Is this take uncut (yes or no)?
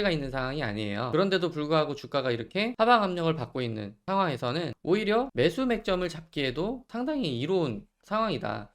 no